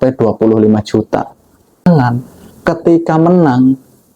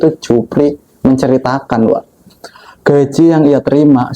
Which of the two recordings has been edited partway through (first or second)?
first